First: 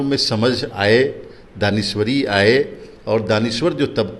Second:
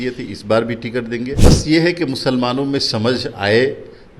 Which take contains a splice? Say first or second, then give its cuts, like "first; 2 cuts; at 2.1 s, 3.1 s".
second; 1 cut; at 1.4 s